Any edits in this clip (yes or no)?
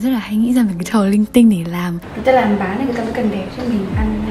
yes